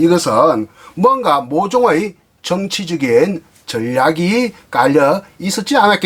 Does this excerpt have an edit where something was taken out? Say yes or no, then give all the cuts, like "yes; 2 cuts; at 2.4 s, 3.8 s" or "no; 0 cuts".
no; 0 cuts